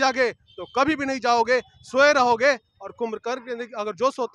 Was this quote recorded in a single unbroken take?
yes; 0 cuts

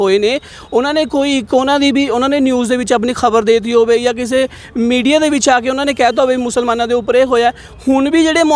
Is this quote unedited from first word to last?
yes; 0 cuts

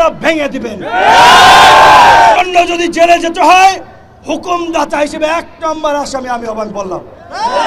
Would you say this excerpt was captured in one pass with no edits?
no; 1 cut; at 2.4 s

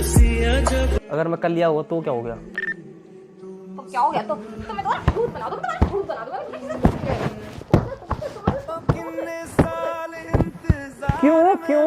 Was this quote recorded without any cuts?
no; 1 cut; at 1.0 s

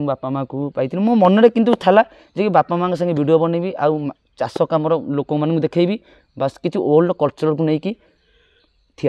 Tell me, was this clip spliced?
no; 0 cuts

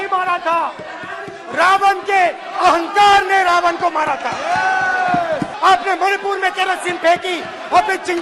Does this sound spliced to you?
yes; 1 cut; at 5.5 s

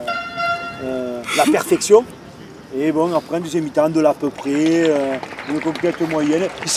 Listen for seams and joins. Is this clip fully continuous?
yes; 0 cuts

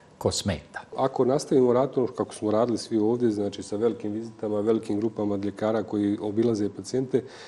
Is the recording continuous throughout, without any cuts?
no; 1 cut; at 0.9 s

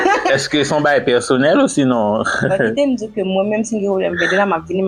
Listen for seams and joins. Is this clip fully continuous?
yes; 0 cuts

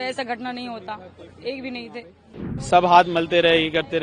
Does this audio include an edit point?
yes; 1 cut; at 2.5 s

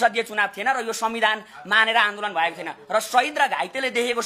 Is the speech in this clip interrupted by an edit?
no; 0 cuts

